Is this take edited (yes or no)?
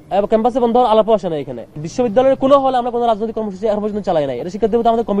yes